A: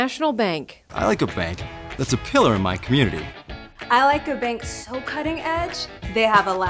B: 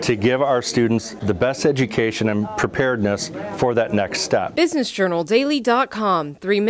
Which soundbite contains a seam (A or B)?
B